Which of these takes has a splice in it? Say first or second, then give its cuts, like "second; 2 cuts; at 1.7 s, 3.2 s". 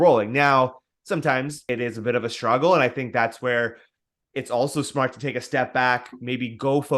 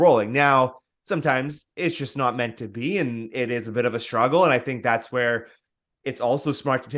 first; 1 cut; at 1.6 s